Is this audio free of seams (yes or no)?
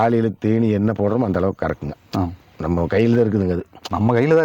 yes